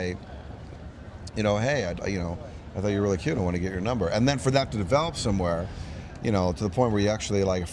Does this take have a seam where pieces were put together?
no; 0 cuts

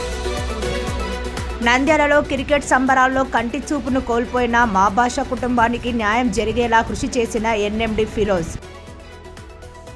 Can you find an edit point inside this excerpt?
no; 0 cuts

